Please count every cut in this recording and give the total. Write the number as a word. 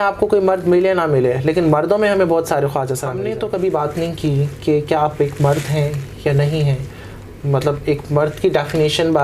one